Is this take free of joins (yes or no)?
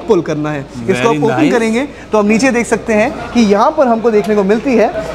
yes